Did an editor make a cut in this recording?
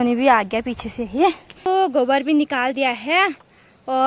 yes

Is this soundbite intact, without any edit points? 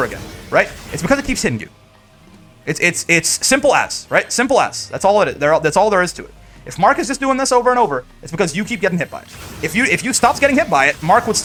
yes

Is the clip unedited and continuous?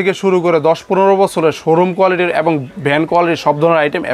yes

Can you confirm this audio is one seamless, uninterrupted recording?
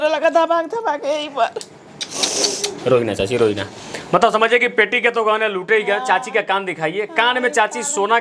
yes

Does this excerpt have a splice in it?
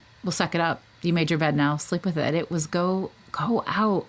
no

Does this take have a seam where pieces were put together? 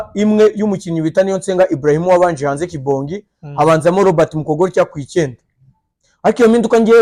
no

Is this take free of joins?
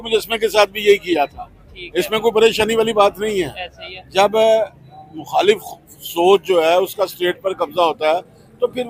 yes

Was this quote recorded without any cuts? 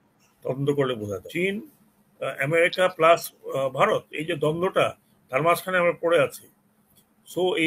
no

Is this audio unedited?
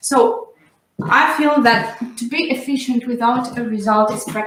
yes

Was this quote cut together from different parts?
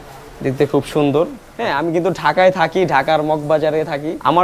yes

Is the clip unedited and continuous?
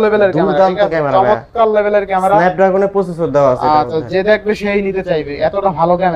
yes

